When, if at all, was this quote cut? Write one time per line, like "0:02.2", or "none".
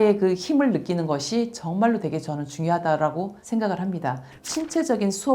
0:04.3

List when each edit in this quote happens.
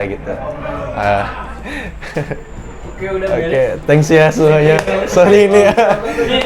none

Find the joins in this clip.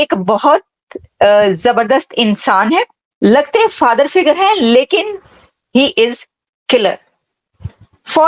0:03.0

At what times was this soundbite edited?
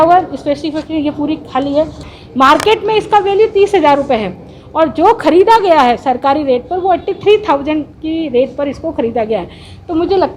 0:02.0

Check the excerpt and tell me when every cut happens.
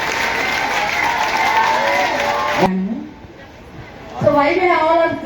0:02.7

